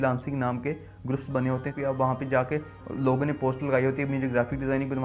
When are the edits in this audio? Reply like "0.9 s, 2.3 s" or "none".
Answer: 1.7 s